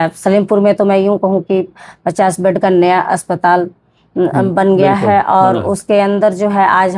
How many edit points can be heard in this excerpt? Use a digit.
0